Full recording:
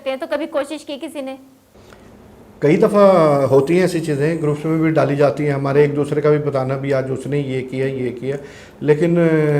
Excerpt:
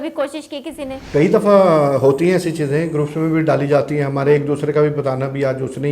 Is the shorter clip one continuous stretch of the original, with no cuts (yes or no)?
no